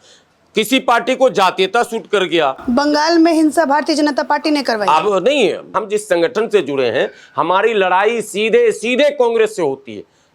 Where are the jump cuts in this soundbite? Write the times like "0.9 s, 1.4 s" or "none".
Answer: 2.6 s, 5.8 s